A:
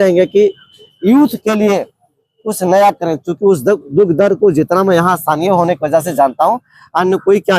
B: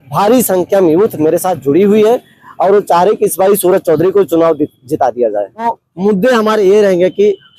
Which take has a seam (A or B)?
B